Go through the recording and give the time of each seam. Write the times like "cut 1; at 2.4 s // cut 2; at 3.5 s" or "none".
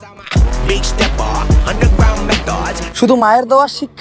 cut 1; at 2.9 s